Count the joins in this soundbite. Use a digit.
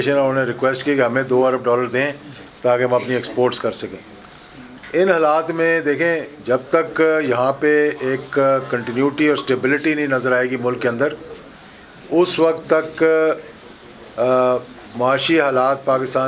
0